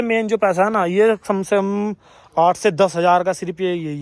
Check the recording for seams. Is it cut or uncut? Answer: uncut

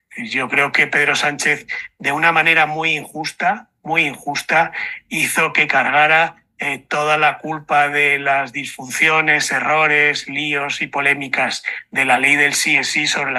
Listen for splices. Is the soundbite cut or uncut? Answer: uncut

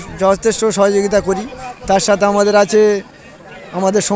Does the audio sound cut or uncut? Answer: uncut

